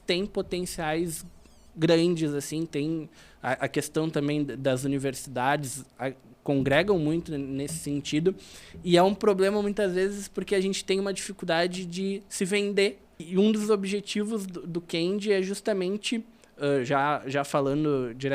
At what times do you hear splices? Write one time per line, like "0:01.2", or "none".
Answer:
0:13.2